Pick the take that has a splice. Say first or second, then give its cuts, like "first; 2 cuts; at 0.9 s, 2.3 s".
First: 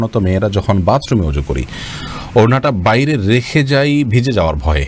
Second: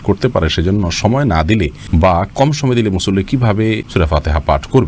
second; 2 cuts; at 1.8 s, 3.9 s